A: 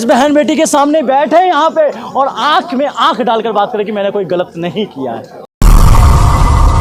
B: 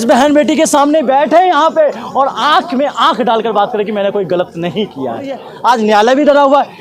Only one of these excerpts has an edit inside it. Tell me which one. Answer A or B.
B